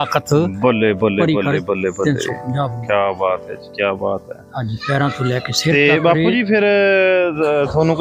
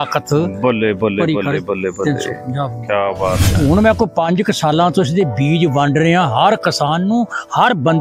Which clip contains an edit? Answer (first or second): second